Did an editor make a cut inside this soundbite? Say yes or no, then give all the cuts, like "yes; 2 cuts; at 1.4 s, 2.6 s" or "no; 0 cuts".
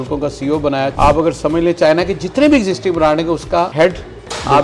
yes; 1 cut; at 0.9 s